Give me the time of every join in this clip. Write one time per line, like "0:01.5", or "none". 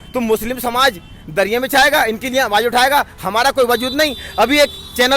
none